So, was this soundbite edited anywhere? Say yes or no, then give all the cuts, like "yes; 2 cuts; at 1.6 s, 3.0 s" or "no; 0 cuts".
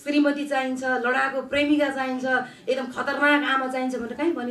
no; 0 cuts